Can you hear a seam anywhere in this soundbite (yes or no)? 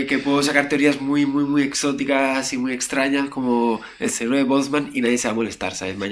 no